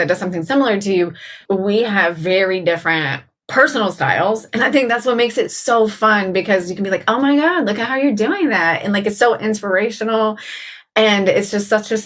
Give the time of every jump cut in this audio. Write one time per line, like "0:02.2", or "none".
0:01.4

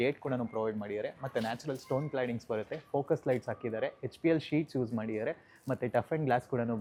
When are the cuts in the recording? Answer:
none

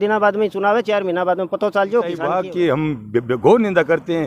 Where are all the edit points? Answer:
0:02.3

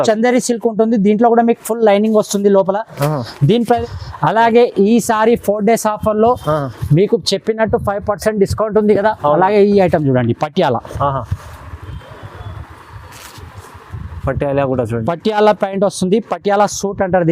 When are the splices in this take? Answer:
0:03.8

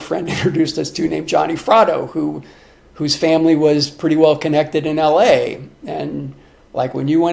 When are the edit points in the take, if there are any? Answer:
none

